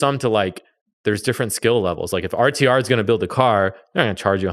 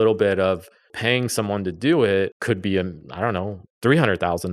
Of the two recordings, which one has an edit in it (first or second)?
second